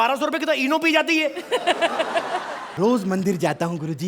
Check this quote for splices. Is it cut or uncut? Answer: cut